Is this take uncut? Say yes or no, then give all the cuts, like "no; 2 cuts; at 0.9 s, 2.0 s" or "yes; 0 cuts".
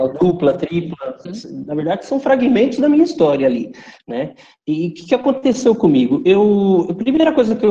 no; 1 cut; at 1.3 s